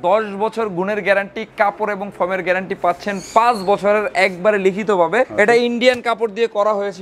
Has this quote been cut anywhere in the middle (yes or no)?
no